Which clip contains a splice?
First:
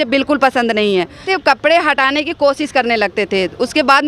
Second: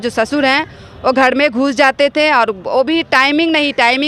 first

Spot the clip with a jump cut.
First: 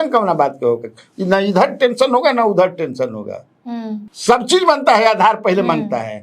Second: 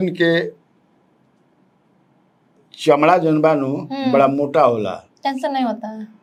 first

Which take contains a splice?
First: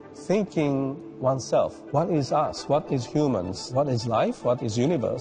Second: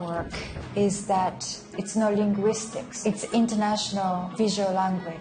second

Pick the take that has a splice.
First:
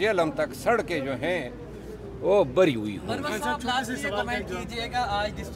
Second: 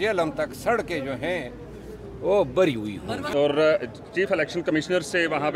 second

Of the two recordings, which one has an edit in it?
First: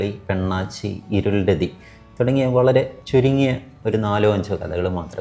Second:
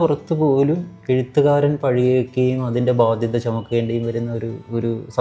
first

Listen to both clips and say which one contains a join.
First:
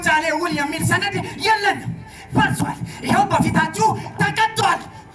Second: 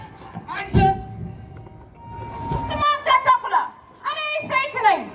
second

